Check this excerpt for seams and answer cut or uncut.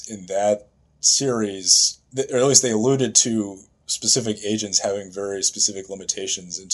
cut